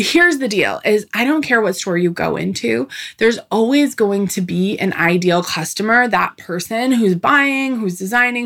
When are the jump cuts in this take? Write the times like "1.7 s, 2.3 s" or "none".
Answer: none